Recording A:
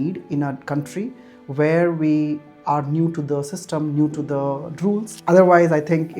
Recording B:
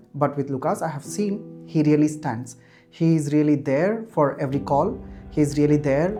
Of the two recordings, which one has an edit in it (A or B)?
A